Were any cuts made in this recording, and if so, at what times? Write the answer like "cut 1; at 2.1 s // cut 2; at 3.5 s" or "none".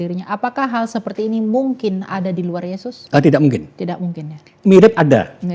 cut 1; at 2.9 s // cut 2; at 4.5 s

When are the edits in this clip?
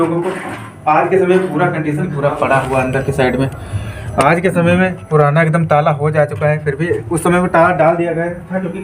cut 1; at 2.1 s

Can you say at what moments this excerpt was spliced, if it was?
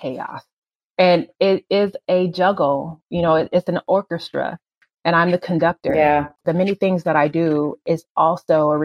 cut 1; at 6.4 s

